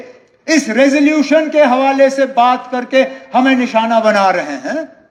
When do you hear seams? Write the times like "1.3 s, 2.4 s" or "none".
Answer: none